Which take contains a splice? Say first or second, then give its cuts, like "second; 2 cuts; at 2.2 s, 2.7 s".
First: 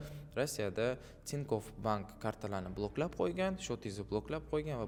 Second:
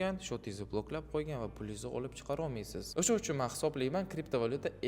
second; 1 cut; at 2.8 s